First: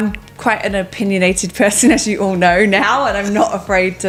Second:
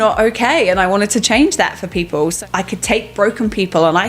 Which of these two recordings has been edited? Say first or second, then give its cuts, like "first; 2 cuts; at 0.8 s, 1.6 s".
second; 1 cut; at 2.3 s